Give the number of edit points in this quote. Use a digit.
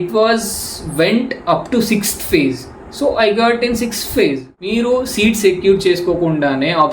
1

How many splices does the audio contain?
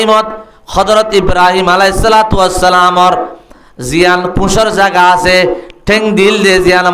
0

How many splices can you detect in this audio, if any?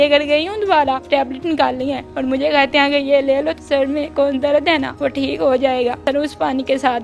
5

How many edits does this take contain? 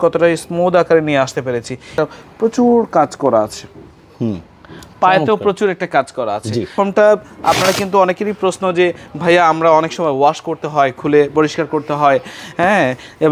2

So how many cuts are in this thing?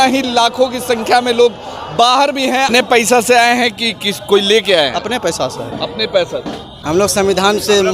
2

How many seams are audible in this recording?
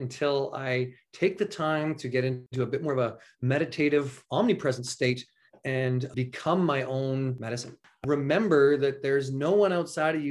3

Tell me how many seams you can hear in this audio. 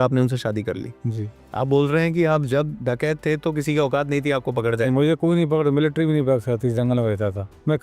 1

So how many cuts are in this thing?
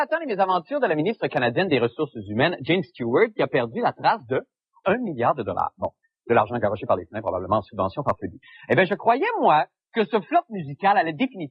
1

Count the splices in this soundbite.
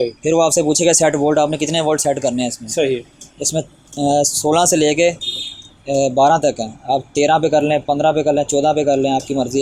0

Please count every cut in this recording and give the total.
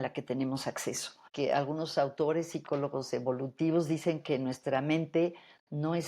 1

